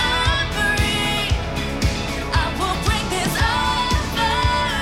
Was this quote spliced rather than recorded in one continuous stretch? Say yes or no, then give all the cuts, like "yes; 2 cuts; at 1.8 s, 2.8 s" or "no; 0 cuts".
no; 0 cuts